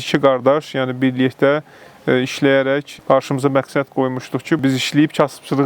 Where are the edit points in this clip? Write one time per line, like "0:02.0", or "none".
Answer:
0:02.9
0:04.6